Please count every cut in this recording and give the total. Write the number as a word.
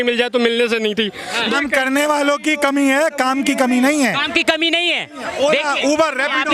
one